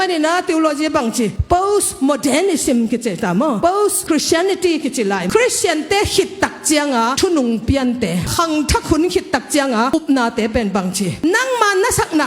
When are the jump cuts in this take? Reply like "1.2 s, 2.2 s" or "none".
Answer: 5.3 s, 8.2 s